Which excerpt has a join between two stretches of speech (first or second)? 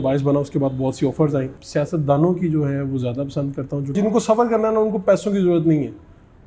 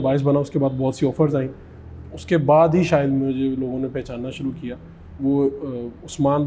first